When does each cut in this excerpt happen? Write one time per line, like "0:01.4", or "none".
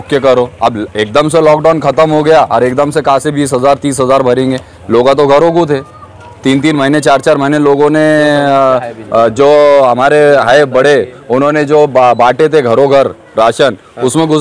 none